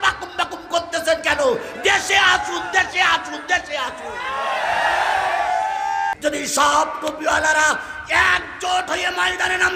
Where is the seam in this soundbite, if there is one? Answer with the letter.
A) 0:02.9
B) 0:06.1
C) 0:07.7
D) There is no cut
B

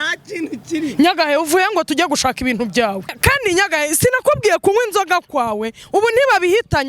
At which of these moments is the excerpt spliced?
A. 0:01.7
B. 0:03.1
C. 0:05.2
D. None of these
B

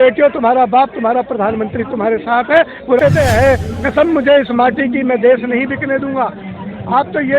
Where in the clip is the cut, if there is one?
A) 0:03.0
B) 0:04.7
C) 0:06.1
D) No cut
A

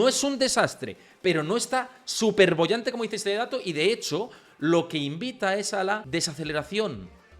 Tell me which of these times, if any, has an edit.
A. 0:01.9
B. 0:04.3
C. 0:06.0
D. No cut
C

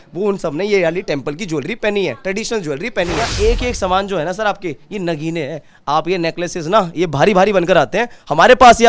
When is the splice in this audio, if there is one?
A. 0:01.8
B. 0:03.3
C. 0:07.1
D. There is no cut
B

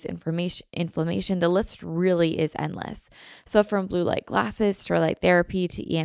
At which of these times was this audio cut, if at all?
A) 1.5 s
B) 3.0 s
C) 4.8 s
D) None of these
D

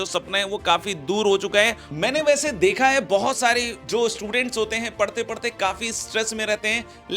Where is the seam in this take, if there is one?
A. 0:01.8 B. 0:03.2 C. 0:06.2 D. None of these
A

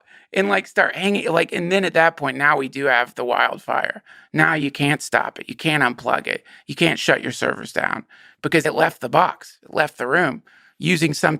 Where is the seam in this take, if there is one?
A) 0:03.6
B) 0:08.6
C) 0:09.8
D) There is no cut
B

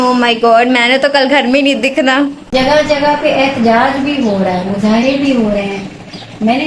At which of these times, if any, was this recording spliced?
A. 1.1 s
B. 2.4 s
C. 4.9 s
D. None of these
B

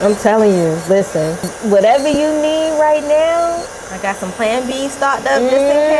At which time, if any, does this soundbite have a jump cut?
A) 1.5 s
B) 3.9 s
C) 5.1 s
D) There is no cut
A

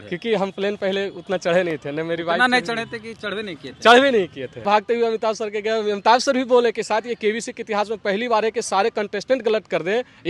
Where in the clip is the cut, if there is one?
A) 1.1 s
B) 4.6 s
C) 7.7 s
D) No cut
B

